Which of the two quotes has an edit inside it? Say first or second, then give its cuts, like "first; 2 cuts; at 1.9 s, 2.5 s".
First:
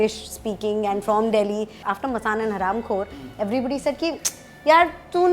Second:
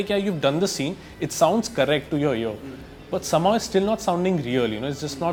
first; 1 cut; at 1.9 s